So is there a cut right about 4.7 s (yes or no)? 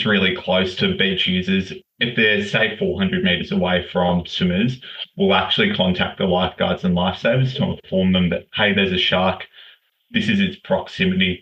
no